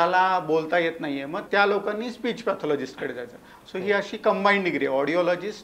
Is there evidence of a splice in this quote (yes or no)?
yes